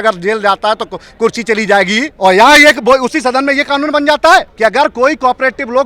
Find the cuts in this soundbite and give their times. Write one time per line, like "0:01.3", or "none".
0:02.1
0:04.5